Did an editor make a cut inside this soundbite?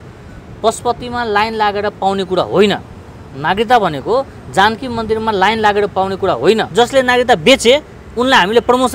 yes; 1 cut; at 6.7 s

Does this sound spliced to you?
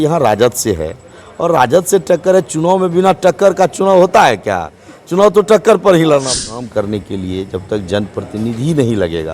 yes; 1 cut; at 6.4 s

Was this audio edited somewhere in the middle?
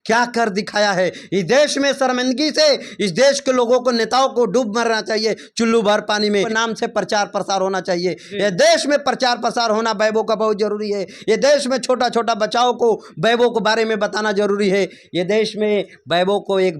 yes; 1 cut; at 6.5 s

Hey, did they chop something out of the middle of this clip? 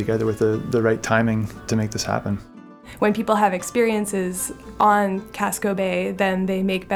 yes; 2 cuts; at 1.6 s, 2.8 s

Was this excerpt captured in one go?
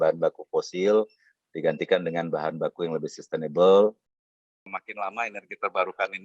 no; 1 cut; at 4.7 s

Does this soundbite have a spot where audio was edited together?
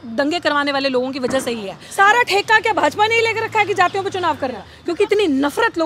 yes; 2 cuts; at 1.8 s, 4.7 s

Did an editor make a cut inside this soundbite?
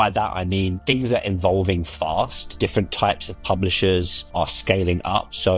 no; 0 cuts

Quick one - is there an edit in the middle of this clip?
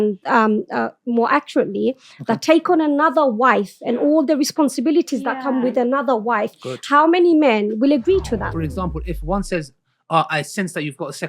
yes; 1 cut; at 8.5 s

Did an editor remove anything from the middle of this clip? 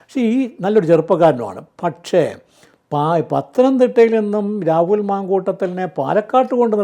no; 0 cuts

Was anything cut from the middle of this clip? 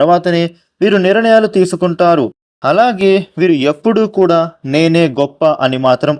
yes; 1 cut; at 2.5 s

